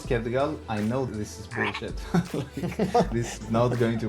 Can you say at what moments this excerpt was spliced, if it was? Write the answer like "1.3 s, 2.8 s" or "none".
1.1 s, 3.1 s